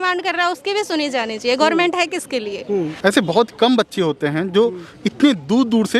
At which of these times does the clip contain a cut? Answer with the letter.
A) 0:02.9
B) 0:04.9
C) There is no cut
A